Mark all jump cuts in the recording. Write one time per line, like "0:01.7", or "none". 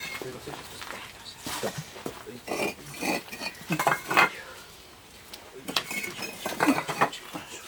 none